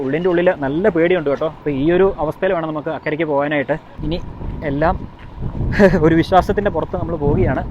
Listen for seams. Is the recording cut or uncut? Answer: cut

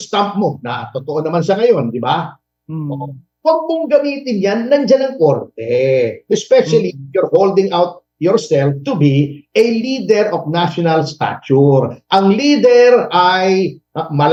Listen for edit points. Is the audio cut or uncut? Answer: uncut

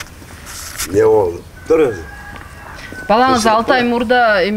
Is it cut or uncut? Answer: uncut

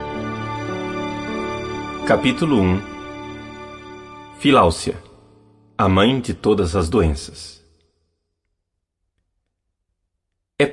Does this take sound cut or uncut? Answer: cut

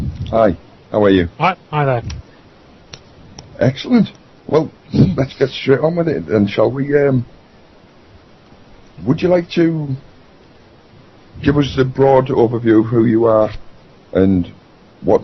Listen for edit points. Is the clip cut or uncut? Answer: cut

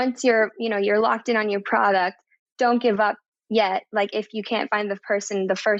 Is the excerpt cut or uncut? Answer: uncut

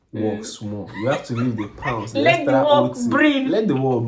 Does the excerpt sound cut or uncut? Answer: uncut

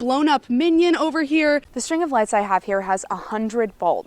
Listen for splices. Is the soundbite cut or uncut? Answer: cut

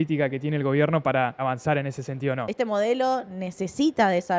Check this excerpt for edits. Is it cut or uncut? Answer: cut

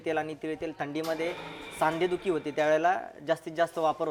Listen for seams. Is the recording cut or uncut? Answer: uncut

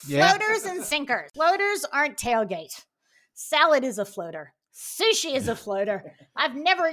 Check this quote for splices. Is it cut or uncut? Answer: cut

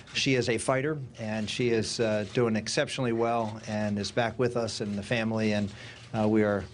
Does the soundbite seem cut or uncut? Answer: cut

